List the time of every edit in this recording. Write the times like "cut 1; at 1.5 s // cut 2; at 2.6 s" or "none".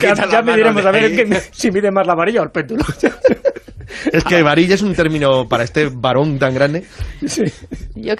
none